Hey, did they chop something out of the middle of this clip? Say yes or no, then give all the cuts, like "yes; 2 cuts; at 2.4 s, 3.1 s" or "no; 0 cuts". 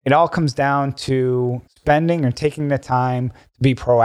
yes; 1 cut; at 1.6 s